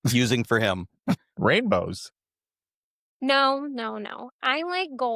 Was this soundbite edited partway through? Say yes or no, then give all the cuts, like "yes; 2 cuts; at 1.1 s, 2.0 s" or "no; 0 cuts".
no; 0 cuts